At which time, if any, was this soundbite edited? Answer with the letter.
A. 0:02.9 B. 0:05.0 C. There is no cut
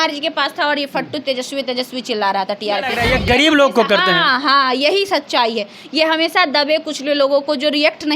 A